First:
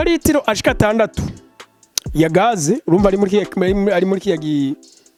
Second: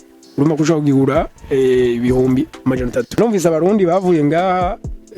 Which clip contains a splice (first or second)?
second